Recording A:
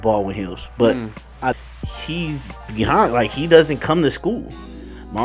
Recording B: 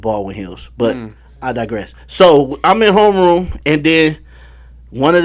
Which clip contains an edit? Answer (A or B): A